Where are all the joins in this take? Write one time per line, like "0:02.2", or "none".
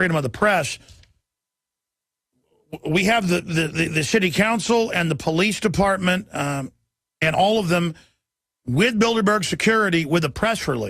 0:08.7